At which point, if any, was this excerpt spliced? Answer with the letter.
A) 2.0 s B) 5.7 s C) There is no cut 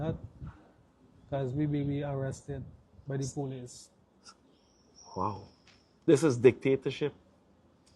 A